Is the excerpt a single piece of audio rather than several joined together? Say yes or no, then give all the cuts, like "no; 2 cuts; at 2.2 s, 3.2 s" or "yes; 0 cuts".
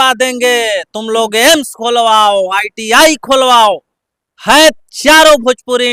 yes; 0 cuts